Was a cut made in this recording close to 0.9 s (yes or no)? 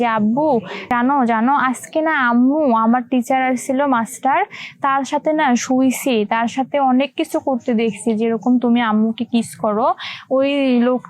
yes